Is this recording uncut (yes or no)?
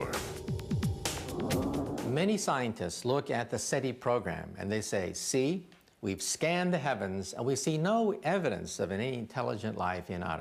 yes